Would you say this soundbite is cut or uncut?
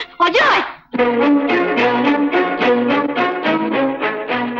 uncut